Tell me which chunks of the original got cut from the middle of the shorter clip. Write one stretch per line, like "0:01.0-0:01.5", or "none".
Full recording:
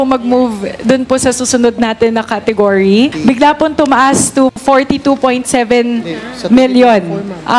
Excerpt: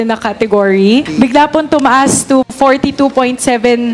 none